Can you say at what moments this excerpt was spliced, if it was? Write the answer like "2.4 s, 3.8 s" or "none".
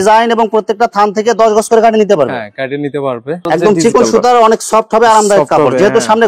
3.5 s